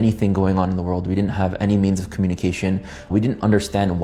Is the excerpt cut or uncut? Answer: uncut